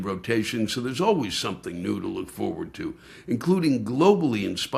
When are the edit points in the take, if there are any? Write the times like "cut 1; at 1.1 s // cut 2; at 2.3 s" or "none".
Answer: none